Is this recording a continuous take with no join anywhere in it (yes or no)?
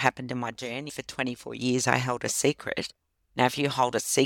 no